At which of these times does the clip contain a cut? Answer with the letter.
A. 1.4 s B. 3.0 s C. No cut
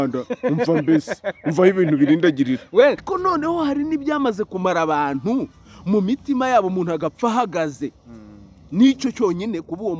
B